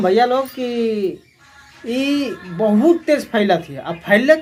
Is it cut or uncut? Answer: uncut